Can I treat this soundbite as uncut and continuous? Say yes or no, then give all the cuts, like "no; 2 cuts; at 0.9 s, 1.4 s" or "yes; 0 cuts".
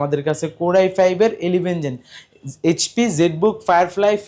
yes; 0 cuts